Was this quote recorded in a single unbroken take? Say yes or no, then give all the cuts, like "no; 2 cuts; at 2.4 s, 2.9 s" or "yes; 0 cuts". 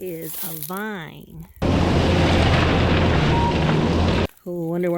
no; 2 cuts; at 1.6 s, 4.2 s